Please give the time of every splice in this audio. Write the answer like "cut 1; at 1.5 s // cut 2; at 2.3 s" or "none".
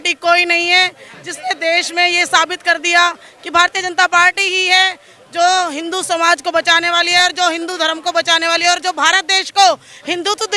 none